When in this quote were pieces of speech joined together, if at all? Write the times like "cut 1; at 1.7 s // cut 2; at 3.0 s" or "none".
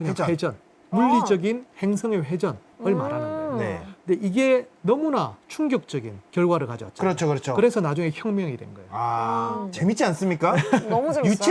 cut 1; at 9.6 s